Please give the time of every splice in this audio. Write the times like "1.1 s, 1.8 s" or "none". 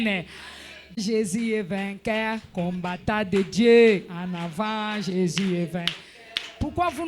0.9 s